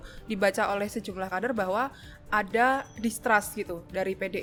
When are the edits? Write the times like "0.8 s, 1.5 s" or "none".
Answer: none